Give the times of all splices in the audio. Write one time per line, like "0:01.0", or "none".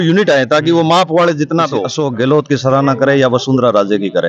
0:01.9